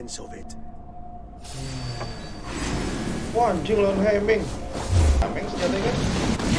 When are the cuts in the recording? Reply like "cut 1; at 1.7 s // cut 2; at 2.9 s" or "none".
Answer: cut 1; at 5.2 s